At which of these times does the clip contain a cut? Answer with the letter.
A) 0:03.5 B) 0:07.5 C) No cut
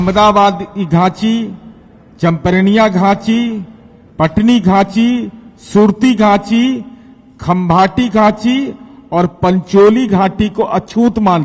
C